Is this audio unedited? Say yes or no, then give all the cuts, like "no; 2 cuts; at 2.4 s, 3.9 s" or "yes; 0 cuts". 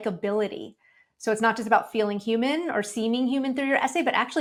yes; 0 cuts